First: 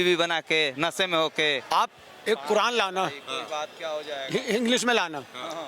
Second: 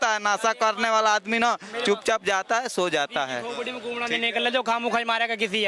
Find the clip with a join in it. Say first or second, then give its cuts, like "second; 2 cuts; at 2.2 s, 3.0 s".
first; 1 cut; at 1.6 s